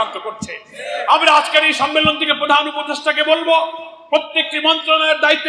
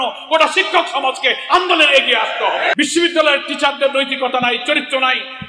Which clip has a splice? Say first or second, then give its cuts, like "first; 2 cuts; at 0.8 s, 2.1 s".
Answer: second; 1 cut; at 2.7 s